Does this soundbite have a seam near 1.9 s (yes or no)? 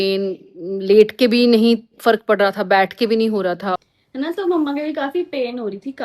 no